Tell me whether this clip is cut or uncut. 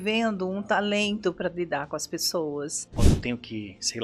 cut